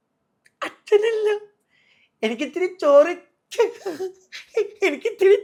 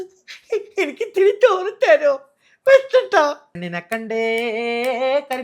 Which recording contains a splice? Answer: second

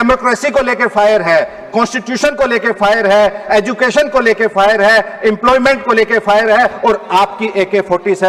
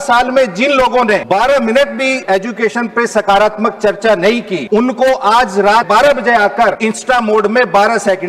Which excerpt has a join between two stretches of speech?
second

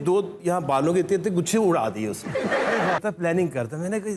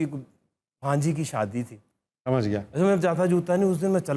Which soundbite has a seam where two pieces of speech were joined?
first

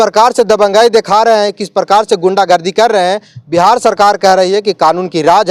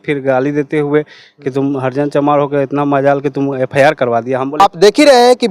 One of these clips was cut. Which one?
second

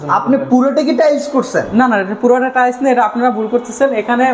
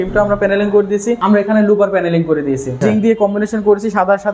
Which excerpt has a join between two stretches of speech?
second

